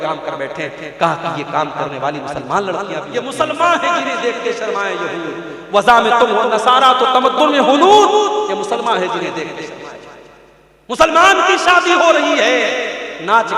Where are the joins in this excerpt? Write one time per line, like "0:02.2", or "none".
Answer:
0:03.1